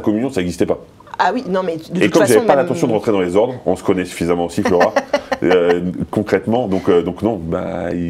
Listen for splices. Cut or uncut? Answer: uncut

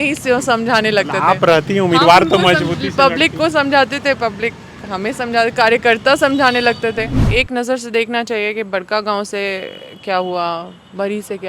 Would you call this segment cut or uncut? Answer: cut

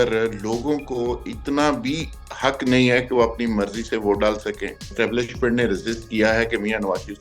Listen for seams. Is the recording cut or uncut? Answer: cut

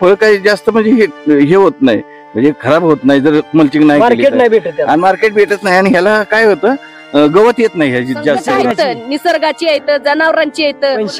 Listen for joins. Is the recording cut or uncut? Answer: cut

